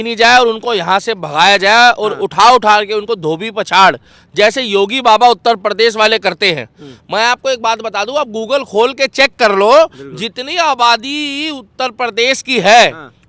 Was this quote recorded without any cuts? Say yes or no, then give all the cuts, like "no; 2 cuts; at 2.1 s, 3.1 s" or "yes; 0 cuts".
yes; 0 cuts